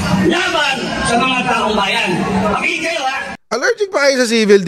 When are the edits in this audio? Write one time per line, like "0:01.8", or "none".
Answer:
0:03.3